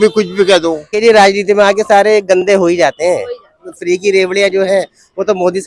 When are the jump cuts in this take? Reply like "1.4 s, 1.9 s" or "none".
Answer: 0.9 s, 3.7 s